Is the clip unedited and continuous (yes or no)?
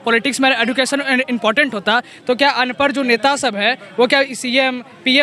yes